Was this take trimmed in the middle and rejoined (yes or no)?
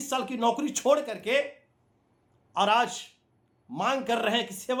no